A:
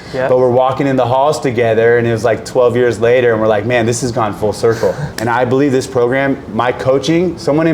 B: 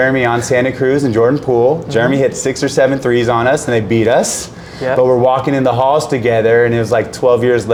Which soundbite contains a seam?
A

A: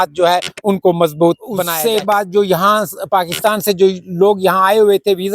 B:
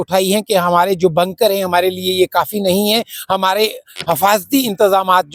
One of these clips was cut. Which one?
A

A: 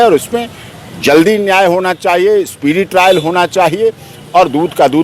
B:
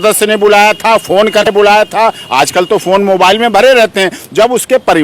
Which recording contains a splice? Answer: B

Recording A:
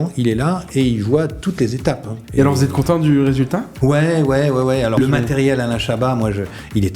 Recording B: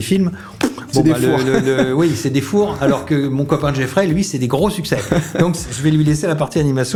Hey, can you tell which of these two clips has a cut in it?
A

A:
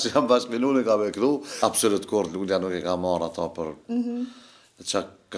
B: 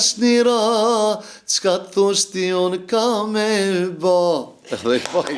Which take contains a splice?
A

